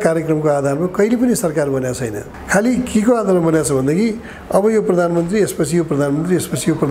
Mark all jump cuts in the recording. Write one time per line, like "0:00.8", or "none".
none